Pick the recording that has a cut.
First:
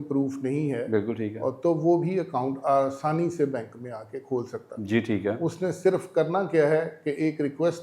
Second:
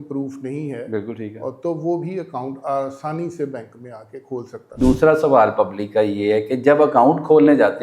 second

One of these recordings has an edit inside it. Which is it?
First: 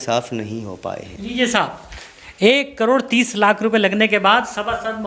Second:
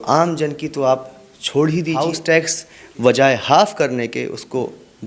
second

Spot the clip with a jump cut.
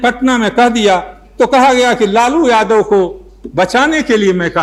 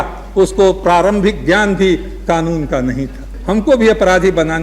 second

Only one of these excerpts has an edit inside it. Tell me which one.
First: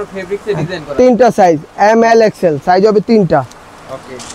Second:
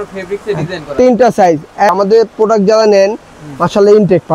second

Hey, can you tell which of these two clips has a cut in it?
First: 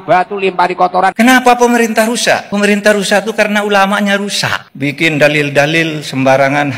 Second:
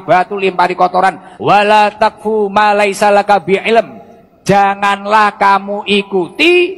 first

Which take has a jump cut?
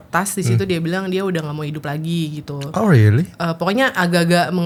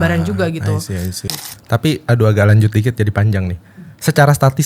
second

